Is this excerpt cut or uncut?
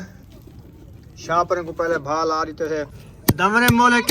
cut